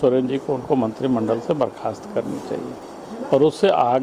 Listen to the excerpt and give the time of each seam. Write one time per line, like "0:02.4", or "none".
0:02.8